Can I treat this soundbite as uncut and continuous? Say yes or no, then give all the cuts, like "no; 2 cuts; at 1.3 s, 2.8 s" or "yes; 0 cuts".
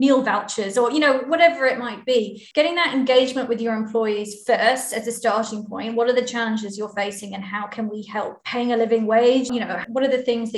no; 3 cuts; at 2.4 s, 8.4 s, 9.8 s